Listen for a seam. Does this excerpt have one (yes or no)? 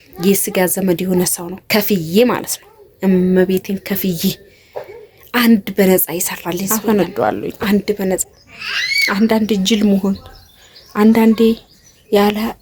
yes